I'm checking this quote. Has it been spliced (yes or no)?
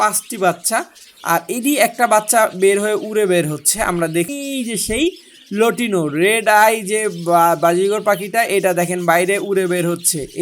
yes